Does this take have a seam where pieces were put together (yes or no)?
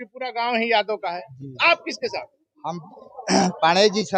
no